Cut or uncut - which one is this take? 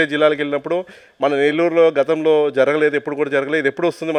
uncut